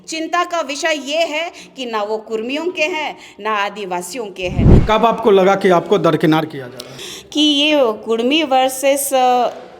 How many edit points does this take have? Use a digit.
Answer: 2